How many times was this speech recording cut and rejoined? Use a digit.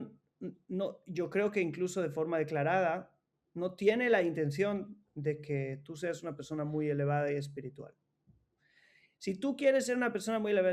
0